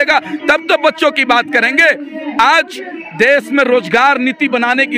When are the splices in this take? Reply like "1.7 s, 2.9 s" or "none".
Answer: none

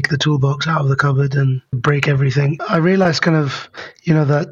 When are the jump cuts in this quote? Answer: 1.8 s, 2.6 s

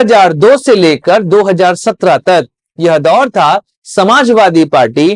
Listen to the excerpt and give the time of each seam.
none

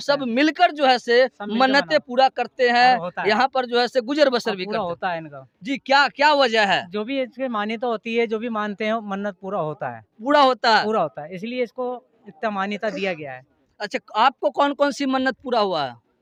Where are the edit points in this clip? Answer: none

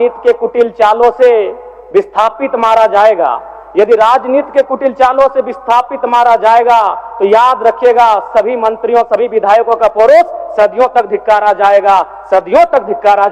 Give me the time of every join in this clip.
none

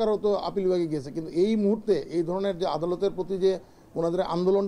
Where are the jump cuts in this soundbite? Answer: none

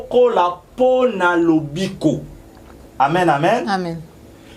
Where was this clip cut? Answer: none

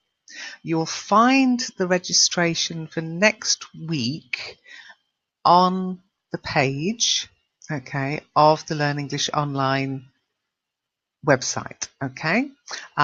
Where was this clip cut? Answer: none

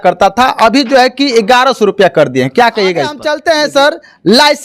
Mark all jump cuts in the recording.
3.2 s

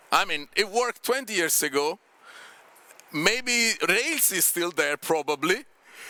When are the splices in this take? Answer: none

